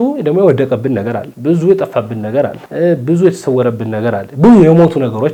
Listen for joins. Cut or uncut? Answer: uncut